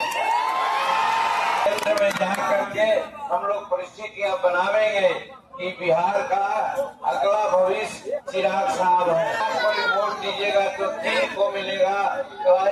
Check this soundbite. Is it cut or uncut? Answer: cut